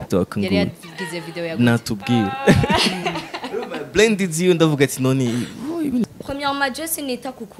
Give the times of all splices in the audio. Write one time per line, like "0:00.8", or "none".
0:06.2